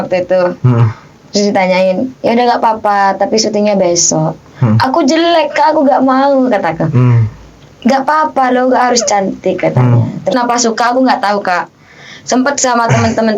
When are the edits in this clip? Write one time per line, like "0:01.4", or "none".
0:10.3